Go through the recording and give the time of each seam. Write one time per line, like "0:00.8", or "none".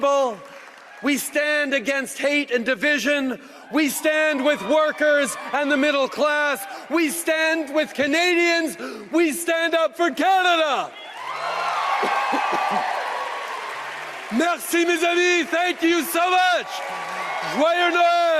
none